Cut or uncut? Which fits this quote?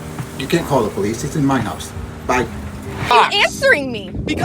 cut